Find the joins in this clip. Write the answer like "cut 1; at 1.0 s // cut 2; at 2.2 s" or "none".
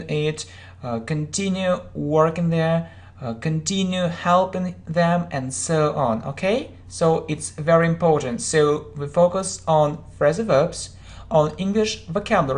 cut 1; at 2.7 s